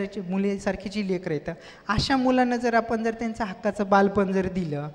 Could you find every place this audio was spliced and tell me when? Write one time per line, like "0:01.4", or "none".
none